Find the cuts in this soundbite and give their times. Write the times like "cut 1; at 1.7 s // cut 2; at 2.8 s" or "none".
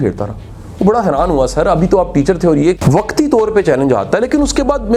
cut 1; at 2.8 s